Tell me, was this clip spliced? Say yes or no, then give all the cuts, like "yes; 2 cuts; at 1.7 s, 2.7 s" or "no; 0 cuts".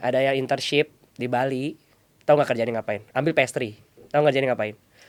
no; 0 cuts